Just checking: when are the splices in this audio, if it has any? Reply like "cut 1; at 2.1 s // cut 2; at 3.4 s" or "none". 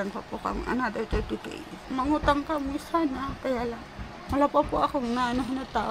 cut 1; at 1.8 s // cut 2; at 4.1 s